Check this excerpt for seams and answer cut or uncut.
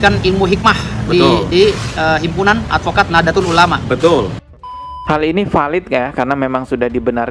cut